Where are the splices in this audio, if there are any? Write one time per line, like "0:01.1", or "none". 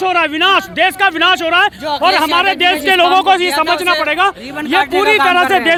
none